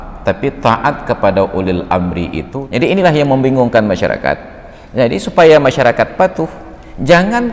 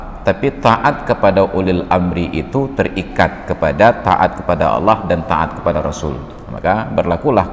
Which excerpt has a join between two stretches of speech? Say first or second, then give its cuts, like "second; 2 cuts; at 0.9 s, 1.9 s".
first; 1 cut; at 2.5 s